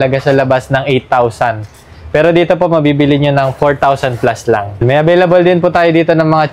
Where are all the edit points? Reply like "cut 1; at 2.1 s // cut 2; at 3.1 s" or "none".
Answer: cut 1; at 4.8 s